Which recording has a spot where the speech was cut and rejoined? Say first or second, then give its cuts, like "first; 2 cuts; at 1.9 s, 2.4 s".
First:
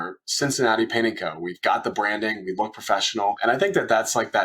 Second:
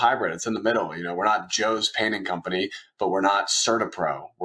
first; 1 cut; at 3.4 s